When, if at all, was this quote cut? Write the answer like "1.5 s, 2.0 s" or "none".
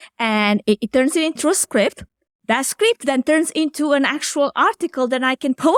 none